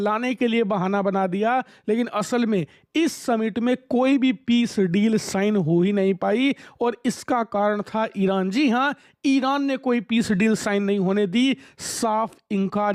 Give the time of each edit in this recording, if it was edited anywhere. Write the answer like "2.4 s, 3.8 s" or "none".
none